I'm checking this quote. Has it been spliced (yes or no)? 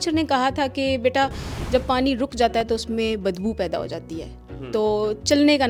no